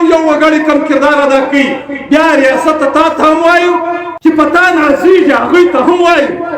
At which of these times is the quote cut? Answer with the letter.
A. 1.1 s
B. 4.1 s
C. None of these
B